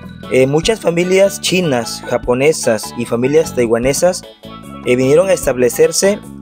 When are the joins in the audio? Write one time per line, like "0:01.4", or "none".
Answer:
none